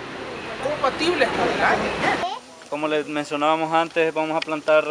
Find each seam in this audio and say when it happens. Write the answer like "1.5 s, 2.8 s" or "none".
2.2 s

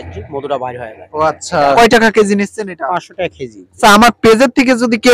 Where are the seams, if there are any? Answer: 1.8 s, 3.8 s

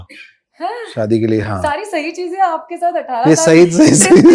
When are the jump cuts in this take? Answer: 1.5 s

